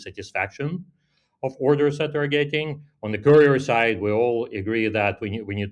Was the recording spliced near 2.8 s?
no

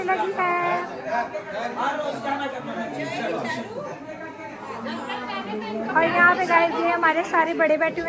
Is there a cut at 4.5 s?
no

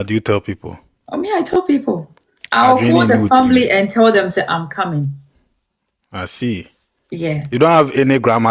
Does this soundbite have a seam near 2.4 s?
yes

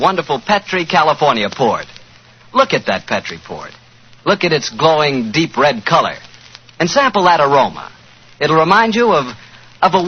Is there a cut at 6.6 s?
yes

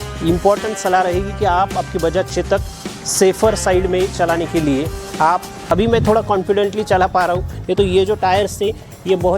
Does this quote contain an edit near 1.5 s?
no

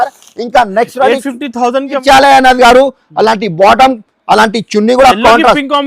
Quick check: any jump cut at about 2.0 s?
yes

